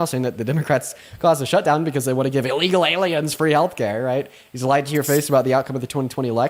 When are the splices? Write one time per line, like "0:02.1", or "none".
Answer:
none